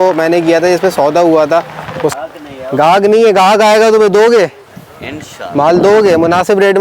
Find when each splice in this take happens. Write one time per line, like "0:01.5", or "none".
0:02.1